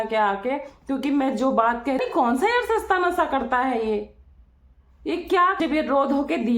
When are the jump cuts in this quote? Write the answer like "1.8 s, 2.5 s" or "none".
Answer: 2.0 s, 5.6 s